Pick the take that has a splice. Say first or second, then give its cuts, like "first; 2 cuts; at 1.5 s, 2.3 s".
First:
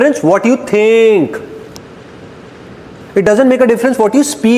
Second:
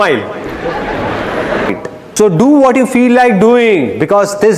second; 1 cut; at 1.7 s